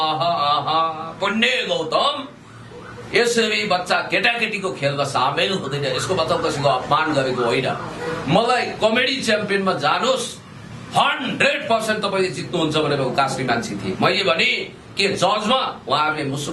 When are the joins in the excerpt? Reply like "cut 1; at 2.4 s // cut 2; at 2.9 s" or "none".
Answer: none